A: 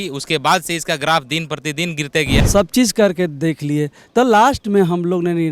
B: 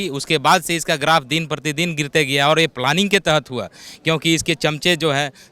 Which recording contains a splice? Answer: A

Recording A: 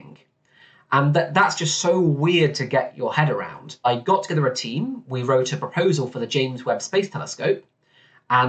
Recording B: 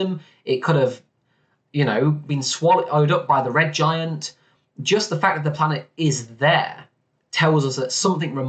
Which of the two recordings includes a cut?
A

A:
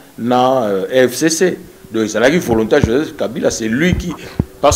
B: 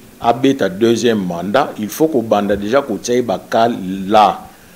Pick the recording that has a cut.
A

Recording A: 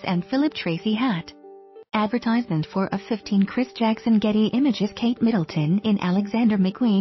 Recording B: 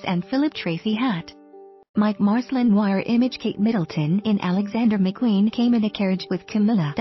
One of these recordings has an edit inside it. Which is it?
B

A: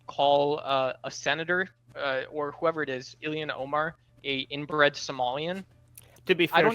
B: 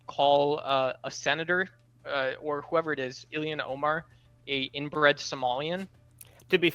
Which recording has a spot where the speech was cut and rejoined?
A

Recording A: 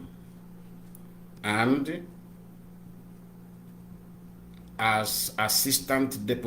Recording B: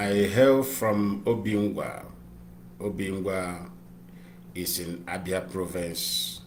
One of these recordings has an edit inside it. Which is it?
A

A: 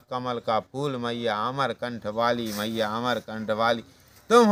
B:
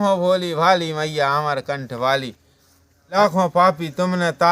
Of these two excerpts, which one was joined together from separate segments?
B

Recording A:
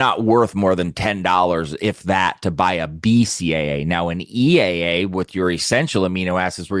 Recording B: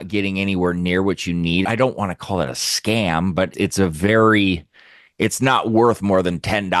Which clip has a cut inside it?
B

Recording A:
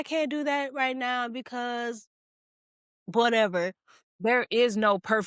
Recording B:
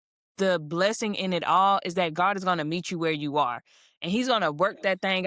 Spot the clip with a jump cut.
A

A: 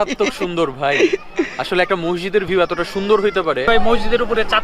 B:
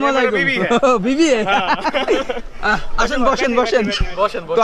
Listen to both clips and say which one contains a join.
A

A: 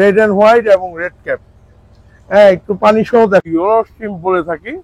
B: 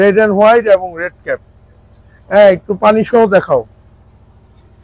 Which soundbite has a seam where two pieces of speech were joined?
A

